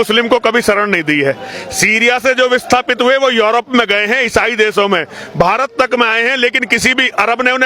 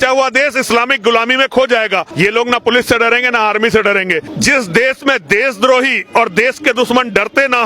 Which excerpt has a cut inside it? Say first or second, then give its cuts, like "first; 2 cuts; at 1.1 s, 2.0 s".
second; 2 cuts; at 2.1 s, 4.3 s